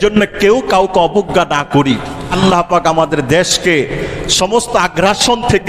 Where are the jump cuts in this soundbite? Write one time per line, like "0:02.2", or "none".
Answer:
0:02.2